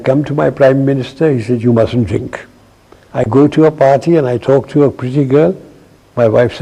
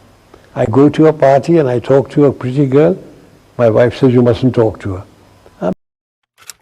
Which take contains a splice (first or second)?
second